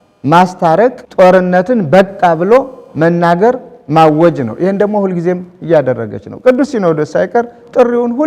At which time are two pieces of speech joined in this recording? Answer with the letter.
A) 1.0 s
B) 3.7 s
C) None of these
A